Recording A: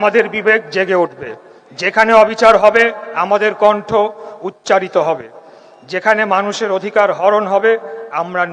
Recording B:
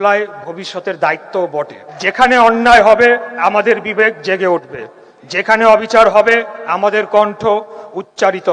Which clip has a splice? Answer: B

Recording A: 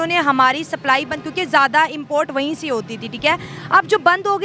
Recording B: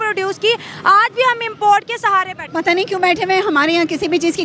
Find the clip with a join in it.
B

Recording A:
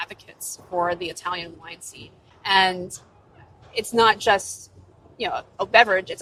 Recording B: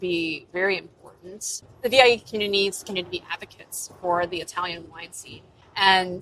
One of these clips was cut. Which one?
B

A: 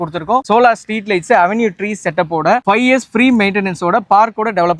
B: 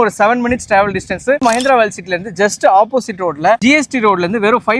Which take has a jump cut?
B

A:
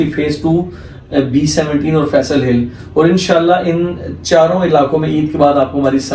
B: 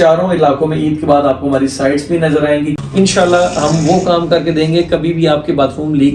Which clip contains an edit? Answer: B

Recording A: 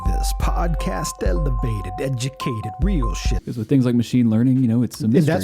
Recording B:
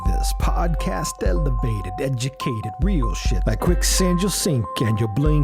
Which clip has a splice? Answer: A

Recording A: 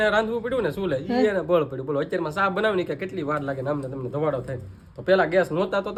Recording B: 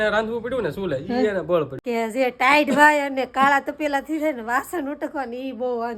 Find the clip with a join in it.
B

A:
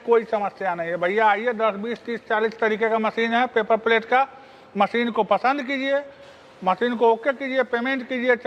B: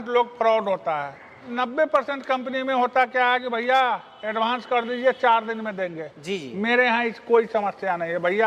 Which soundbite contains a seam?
B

